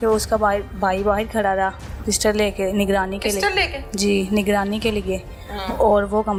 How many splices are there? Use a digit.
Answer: 0